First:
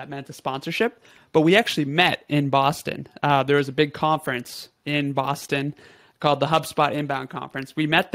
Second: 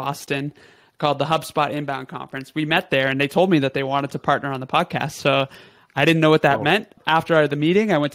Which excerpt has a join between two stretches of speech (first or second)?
second